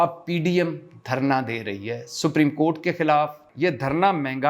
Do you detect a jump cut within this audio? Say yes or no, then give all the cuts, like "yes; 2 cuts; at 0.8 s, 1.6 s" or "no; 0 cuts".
yes; 1 cut; at 3.5 s